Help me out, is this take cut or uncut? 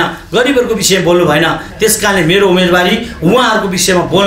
uncut